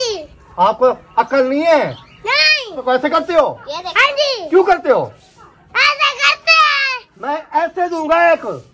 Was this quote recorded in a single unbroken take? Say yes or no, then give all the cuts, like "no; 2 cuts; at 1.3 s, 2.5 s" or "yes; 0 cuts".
no; 1 cut; at 2.8 s